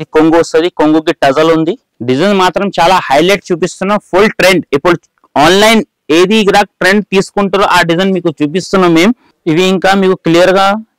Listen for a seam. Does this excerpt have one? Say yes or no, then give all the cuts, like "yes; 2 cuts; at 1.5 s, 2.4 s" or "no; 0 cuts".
yes; 2 cuts; at 1.9 s, 9.3 s